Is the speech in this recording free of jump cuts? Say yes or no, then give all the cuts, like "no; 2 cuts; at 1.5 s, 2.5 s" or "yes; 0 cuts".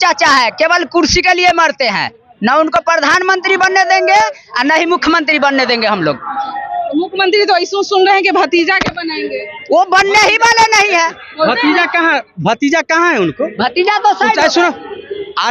yes; 0 cuts